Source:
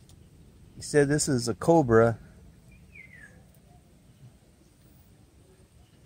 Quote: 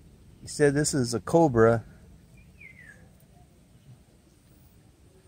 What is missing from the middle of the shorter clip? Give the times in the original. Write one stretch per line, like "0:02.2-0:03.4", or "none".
none